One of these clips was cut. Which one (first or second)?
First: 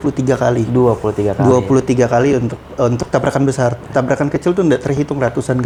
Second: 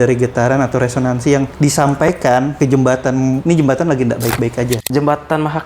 second